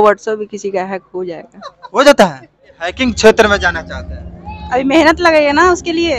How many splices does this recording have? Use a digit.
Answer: 1